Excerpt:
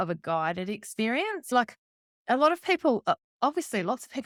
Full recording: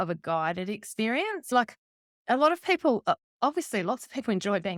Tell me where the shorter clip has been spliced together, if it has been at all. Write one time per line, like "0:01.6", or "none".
none